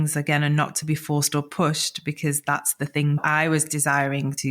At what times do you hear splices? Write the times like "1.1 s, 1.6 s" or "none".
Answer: 3.2 s